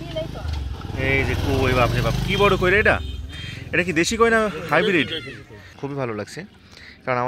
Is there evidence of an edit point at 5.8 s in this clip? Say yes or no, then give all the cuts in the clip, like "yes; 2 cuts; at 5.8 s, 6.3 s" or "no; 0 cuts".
yes; 1 cut; at 5.8 s